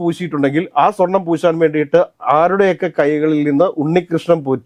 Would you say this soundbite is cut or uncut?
uncut